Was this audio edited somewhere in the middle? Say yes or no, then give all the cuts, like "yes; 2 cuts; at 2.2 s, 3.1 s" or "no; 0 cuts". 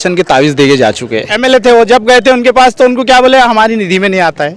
yes; 1 cut; at 1.3 s